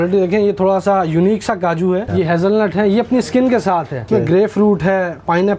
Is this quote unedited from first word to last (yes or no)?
no